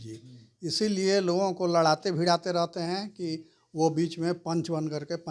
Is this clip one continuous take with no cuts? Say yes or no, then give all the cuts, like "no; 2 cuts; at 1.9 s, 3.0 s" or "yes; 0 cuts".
yes; 0 cuts